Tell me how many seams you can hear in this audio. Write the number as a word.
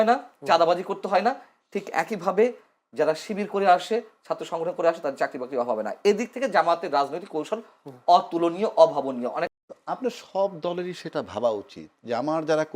one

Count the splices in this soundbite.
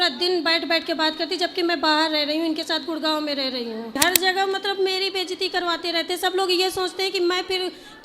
one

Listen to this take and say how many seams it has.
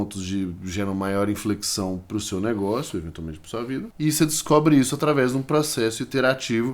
one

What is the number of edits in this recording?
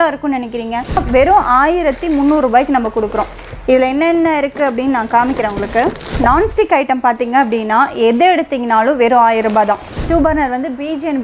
three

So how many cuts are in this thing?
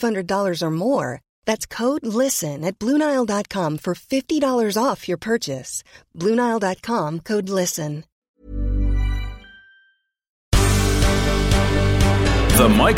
two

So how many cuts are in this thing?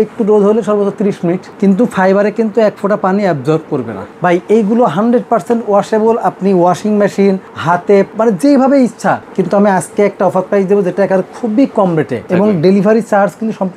five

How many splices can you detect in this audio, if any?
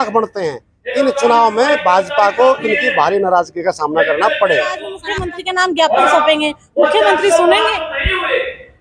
one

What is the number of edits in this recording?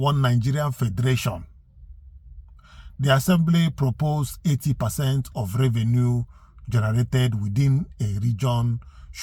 zero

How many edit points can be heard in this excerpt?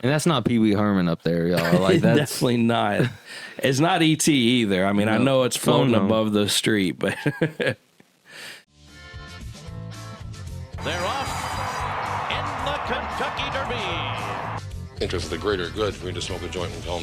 one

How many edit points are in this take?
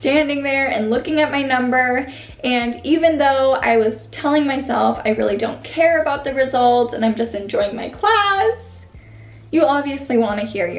zero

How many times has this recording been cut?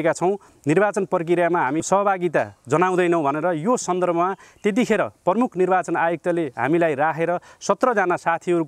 one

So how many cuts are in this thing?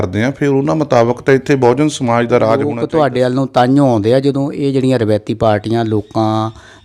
one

